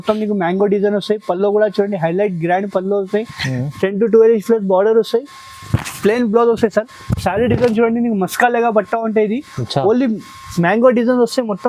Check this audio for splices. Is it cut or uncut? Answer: uncut